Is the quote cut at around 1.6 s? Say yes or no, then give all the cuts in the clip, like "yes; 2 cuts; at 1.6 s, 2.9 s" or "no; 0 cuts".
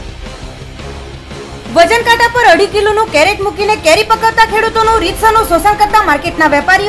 yes; 1 cut; at 1.6 s